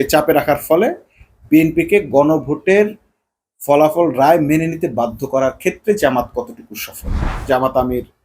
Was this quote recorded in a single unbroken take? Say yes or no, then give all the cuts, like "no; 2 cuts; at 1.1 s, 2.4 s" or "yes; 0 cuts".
no; 1 cut; at 7.3 s